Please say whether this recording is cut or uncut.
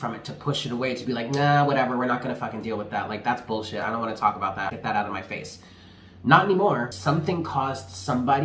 cut